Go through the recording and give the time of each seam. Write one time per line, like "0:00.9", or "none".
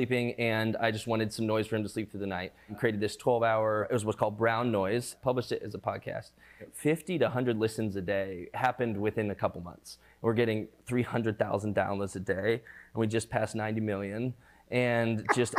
0:02.7
0:03.9
0:05.1
0:06.6
0:10.1